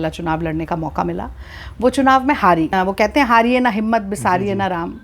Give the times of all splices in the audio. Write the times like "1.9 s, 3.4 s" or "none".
2.7 s